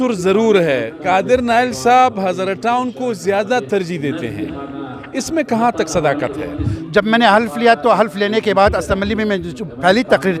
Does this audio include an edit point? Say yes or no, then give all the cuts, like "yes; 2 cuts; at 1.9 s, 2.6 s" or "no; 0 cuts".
yes; 2 cuts; at 1.0 s, 6.7 s